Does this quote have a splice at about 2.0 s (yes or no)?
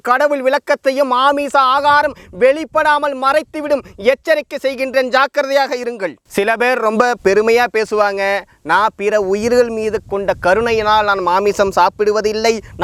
no